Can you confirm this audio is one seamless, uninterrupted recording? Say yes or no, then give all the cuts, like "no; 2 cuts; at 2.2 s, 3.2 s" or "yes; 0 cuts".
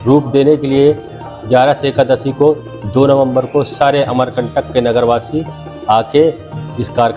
yes; 0 cuts